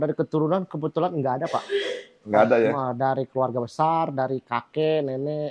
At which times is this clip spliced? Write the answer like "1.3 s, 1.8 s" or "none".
none